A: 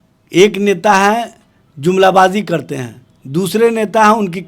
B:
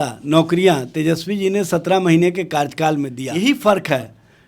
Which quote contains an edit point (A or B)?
B